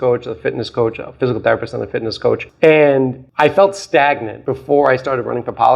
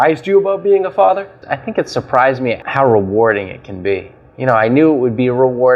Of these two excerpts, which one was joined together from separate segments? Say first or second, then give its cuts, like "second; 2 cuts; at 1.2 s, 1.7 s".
second; 1 cut; at 1.4 s